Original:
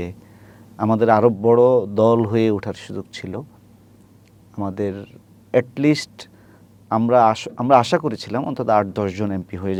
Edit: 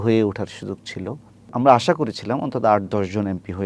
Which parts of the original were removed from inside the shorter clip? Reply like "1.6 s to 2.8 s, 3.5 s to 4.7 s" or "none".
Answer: 3.7 s to 7.5 s